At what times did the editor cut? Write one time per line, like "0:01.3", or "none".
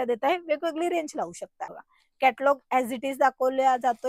0:01.8